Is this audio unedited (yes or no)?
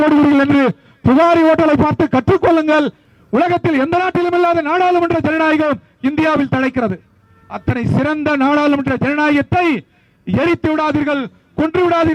no